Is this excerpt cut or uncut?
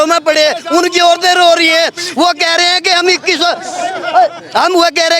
uncut